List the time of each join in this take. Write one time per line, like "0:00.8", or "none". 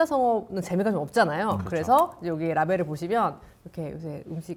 none